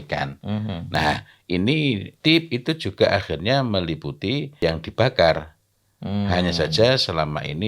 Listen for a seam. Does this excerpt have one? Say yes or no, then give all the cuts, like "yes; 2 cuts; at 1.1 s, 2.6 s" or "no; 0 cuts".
yes; 2 cuts; at 2.2 s, 4.5 s